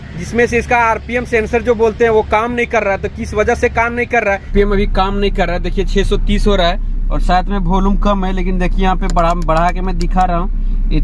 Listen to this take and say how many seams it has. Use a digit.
1